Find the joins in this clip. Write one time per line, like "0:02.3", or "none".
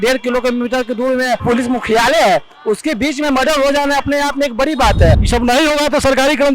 0:01.4
0:05.2